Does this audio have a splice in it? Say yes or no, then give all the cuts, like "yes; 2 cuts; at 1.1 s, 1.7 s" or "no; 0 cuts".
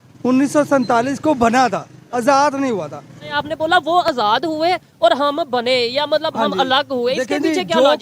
yes; 1 cut; at 3.4 s